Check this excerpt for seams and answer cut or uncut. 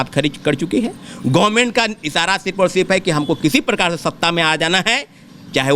uncut